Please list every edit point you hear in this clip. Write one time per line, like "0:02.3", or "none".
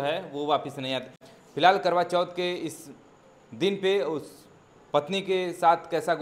0:01.2

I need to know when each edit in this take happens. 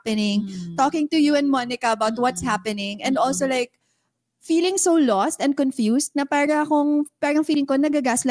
none

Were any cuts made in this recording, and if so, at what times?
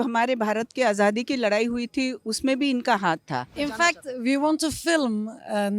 0:03.5

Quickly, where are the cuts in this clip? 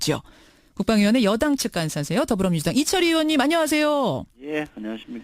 0:02.9

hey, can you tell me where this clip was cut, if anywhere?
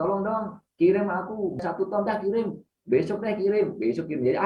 0:01.6

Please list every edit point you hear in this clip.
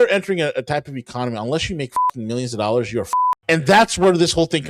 0:03.4

